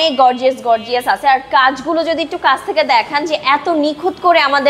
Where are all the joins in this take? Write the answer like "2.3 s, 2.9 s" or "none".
none